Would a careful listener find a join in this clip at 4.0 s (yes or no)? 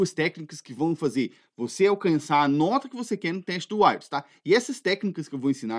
no